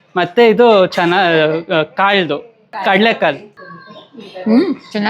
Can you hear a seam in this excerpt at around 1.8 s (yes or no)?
no